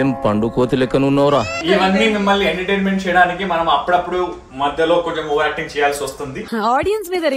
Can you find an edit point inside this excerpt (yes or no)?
yes